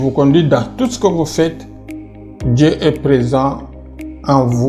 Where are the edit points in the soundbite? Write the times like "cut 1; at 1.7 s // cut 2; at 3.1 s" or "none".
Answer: none